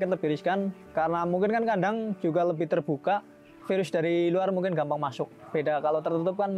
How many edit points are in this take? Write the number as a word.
one